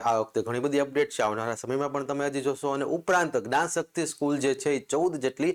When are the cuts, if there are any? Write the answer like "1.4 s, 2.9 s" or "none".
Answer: none